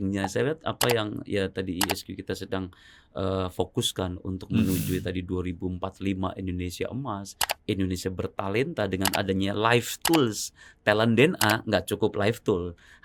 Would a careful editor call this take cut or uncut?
uncut